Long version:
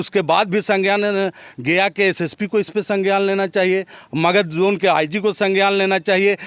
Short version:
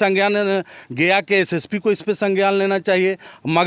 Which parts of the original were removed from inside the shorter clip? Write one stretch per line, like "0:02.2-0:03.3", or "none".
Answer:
none